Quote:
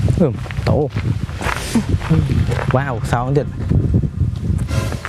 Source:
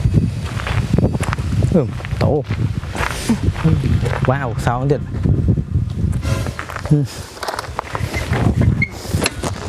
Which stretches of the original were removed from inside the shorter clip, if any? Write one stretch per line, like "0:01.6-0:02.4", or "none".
none